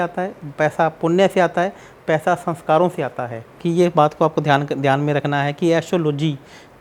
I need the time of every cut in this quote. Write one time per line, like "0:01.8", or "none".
0:03.5

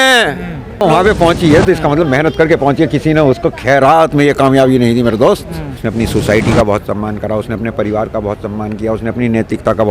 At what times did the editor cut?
0:00.8
0:05.8

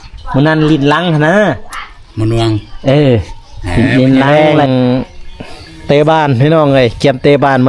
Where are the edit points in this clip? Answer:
0:04.3

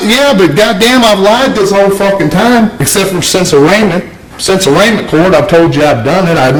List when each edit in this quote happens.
none

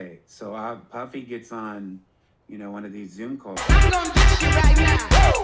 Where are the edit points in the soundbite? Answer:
0:03.5

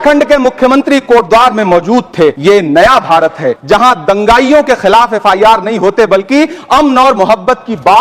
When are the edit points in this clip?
0:02.4
0:03.5

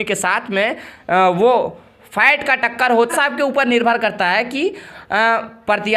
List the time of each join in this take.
0:03.1

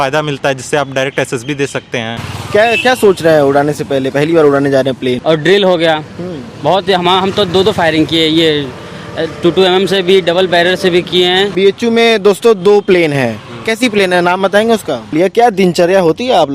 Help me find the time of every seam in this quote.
0:02.3
0:05.2
0:11.5
0:15.1

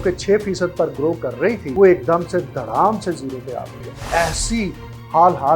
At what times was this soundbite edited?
0:01.7
0:03.9

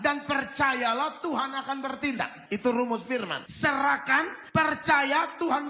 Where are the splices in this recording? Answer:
0:02.4
0:03.4
0:04.4

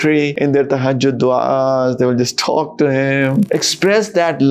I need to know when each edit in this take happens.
0:03.5

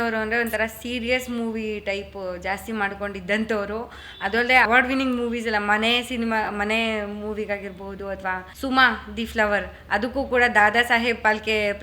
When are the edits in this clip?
none

